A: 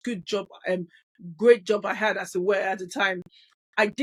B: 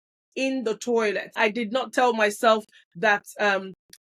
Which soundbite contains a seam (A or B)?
B